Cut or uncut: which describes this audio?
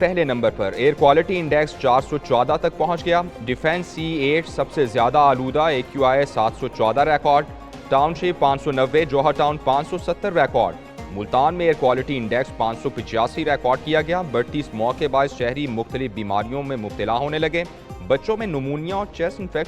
uncut